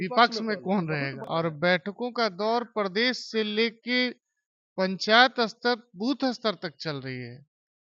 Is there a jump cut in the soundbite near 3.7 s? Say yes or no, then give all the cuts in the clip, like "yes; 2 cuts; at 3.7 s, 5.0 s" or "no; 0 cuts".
no; 1 cut; at 1.2 s